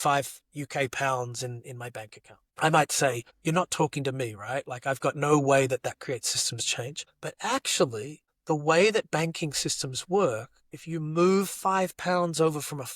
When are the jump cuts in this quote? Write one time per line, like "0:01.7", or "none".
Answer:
0:03.3